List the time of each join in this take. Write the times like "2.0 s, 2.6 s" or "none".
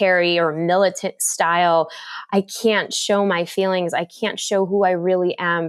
none